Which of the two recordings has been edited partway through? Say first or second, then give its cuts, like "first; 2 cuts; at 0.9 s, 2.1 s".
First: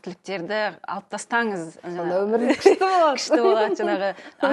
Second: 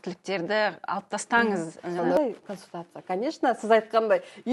second; 1 cut; at 2.2 s